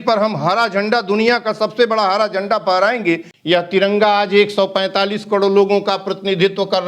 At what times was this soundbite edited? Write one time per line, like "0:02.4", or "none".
0:03.3